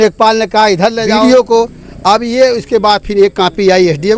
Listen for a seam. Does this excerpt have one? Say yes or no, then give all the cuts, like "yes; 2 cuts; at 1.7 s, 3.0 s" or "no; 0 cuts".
yes; 1 cut; at 1.1 s